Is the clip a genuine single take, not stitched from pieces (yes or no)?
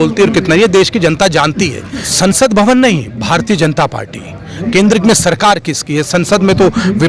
no